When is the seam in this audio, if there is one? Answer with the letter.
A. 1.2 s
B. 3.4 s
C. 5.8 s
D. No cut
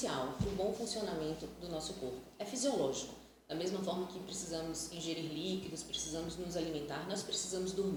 D